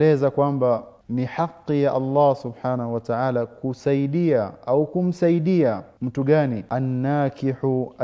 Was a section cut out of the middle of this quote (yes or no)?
yes